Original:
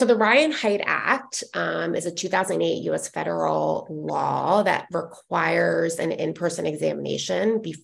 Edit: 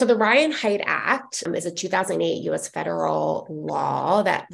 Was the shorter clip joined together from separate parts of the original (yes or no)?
yes